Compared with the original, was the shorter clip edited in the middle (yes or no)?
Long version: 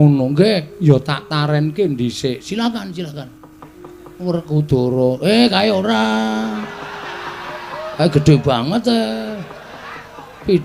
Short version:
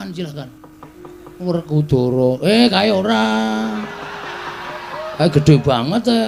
no